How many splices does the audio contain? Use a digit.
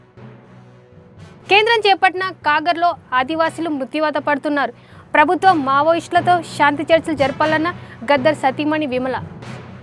1